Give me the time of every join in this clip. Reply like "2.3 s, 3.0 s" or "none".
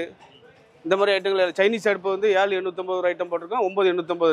none